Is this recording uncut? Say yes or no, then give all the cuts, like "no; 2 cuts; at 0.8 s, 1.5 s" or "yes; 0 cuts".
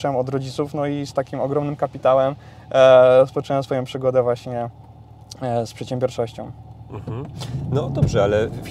yes; 0 cuts